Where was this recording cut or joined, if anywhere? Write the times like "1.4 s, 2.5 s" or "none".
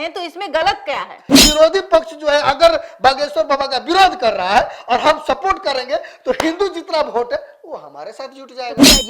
1.3 s